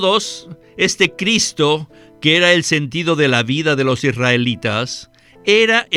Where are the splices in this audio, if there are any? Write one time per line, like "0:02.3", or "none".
none